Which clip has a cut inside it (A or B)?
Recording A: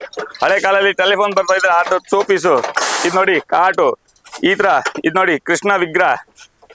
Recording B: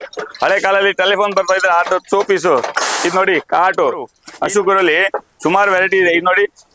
B